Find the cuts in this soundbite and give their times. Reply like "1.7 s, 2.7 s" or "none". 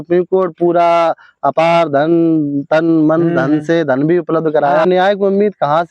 4.8 s